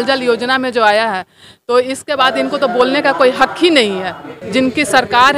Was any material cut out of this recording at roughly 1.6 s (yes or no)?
no